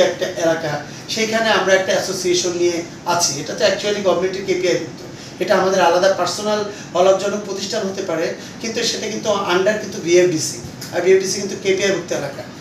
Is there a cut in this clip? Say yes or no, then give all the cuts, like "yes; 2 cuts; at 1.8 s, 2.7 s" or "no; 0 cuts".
no; 0 cuts